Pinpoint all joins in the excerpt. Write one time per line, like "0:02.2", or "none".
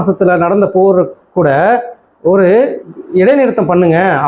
none